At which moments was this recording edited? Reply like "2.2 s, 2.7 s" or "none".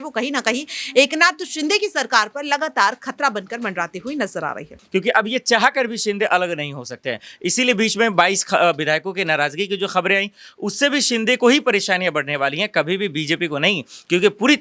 4.7 s